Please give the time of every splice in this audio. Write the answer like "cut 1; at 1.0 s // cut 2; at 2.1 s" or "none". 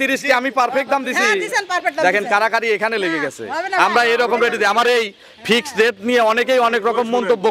none